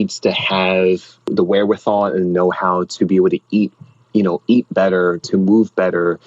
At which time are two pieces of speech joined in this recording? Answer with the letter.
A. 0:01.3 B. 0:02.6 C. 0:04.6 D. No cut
A